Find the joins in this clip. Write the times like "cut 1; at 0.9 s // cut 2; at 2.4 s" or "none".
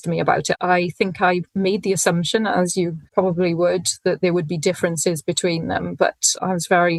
none